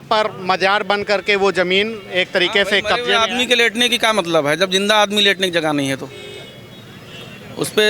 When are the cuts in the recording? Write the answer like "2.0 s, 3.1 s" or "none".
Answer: none